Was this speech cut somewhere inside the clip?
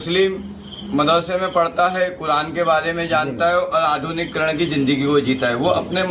no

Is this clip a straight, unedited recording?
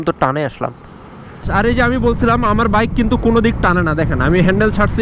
no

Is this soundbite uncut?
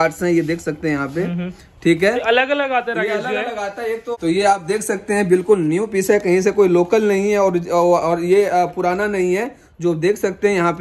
no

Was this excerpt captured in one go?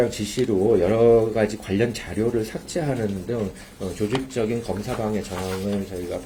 yes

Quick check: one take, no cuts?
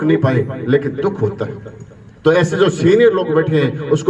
yes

